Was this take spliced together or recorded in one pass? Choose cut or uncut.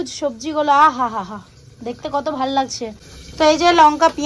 cut